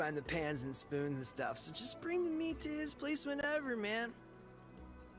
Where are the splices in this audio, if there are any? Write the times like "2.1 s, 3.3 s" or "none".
none